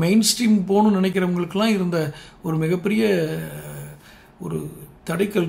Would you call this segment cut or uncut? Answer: cut